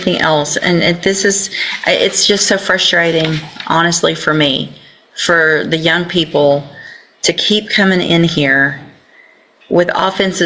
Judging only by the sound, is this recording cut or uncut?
uncut